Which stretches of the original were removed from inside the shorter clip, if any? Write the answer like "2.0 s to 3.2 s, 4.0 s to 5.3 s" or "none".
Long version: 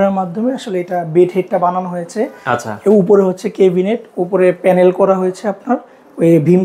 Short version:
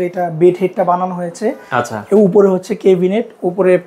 none